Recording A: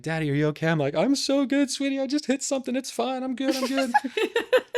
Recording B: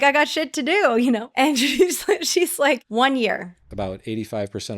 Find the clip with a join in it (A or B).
B